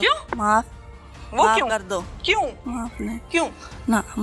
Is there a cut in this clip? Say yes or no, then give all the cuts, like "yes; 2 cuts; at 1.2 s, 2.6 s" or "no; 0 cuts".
yes; 1 cut; at 2.6 s